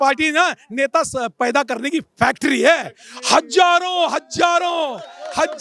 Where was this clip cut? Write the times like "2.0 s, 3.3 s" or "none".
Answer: none